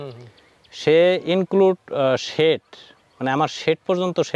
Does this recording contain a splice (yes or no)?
no